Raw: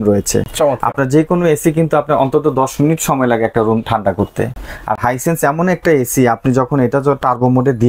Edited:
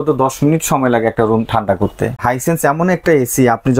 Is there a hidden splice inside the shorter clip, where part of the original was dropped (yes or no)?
yes